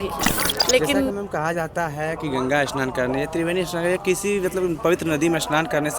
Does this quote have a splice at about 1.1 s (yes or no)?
yes